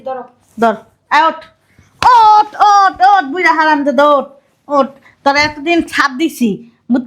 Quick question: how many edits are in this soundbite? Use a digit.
0